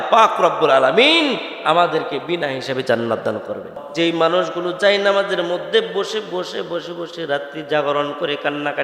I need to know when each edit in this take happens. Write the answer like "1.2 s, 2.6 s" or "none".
3.8 s